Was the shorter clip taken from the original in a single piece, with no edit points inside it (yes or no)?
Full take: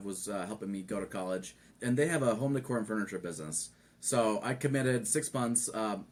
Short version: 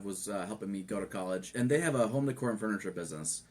no